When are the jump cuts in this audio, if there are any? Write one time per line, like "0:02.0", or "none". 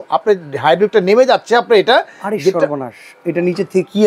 none